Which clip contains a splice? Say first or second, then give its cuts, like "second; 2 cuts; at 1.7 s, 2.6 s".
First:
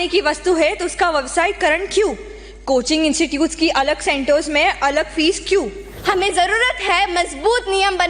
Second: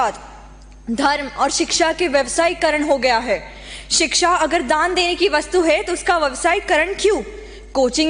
first; 1 cut; at 5.8 s